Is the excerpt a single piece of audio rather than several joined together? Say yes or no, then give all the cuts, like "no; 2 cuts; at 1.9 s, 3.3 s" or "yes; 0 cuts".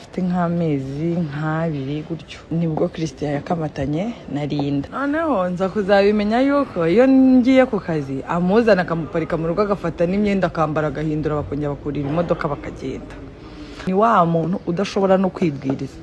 no; 3 cuts; at 2.3 s, 4.9 s, 13.8 s